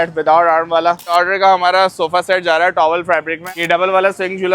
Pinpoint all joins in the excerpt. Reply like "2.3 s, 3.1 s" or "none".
1.1 s, 3.5 s